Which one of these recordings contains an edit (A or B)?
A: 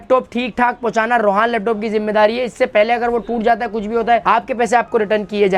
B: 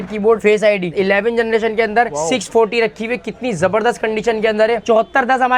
B